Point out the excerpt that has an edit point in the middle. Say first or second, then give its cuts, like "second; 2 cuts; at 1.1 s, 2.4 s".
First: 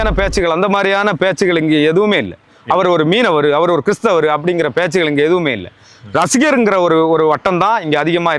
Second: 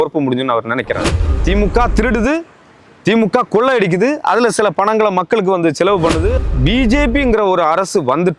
second; 2 cuts; at 1.4 s, 6.3 s